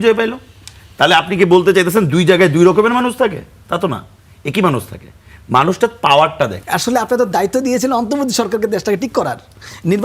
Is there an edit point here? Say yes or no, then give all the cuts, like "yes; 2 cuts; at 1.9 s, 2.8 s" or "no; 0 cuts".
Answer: yes; 1 cut; at 6.6 s